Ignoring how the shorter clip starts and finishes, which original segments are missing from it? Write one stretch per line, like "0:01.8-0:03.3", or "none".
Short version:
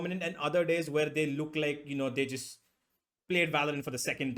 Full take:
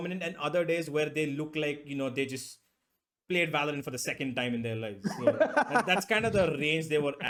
none